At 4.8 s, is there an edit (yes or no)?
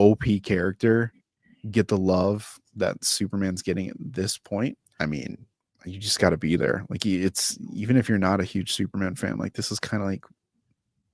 yes